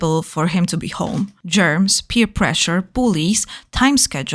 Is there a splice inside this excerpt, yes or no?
yes